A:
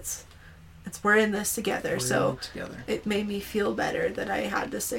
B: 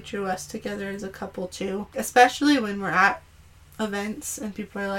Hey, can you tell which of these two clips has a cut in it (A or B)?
B